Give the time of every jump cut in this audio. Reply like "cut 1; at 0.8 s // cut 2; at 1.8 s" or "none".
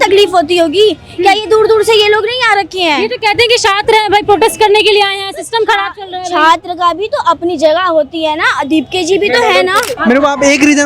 cut 1; at 9.9 s